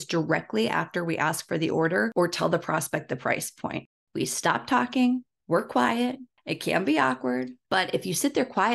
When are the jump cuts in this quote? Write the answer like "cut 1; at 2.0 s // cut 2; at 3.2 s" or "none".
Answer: cut 1; at 2.1 s // cut 2; at 4.0 s